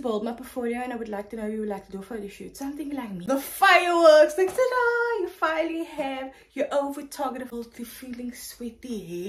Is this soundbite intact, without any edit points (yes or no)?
no